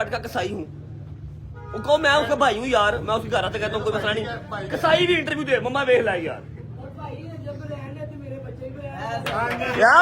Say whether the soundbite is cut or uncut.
uncut